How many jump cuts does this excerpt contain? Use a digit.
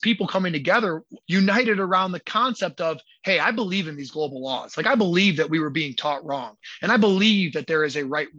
1